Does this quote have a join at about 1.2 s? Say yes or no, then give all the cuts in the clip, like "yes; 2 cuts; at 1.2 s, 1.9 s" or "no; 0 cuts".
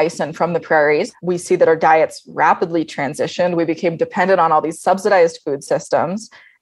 yes; 1 cut; at 1.2 s